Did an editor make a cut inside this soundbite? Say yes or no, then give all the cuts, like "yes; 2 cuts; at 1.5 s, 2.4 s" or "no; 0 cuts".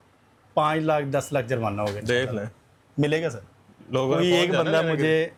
no; 0 cuts